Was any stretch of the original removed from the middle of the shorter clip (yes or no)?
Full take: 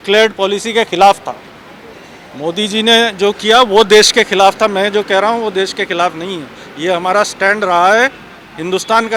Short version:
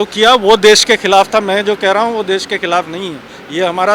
no